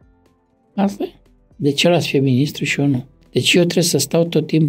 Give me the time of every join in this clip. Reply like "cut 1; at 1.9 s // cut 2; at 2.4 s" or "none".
cut 1; at 3.2 s